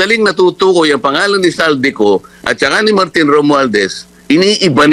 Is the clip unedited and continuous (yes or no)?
yes